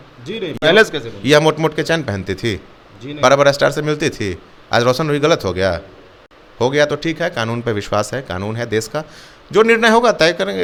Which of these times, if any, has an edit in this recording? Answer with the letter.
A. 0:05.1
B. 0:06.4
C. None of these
C